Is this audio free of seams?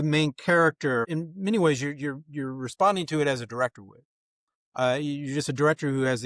no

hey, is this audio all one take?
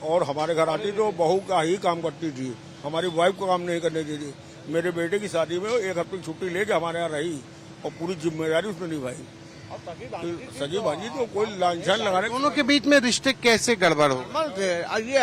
yes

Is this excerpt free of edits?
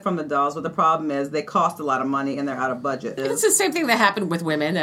no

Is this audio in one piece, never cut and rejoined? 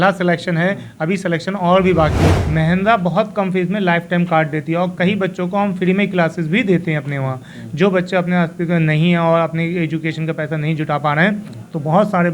no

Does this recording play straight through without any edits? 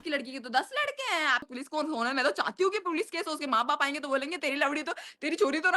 no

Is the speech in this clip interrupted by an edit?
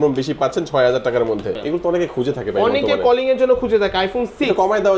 yes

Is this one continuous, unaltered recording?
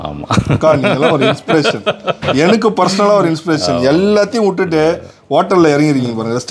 yes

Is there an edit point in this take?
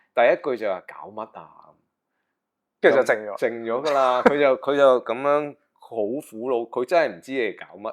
no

